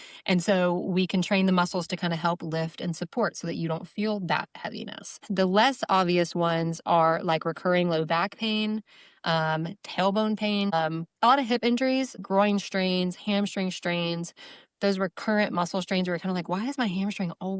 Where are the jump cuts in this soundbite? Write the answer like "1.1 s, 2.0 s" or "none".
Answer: 5.2 s, 10.7 s, 12.2 s